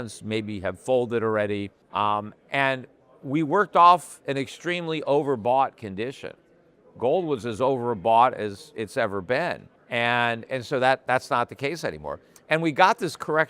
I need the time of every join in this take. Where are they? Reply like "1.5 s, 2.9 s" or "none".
1.8 s, 9.7 s

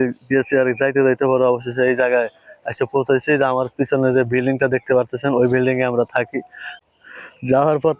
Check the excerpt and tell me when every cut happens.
6.6 s

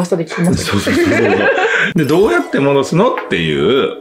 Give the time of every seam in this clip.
1.8 s

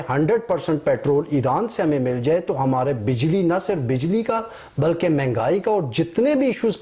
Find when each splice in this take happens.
none

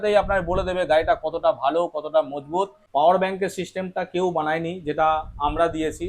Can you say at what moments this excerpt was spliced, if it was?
2.8 s

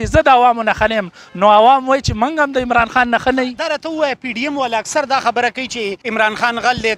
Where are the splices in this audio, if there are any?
3.6 s, 6.0 s

